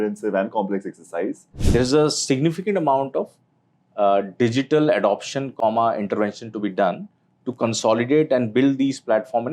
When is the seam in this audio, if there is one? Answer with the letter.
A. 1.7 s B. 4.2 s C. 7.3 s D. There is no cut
A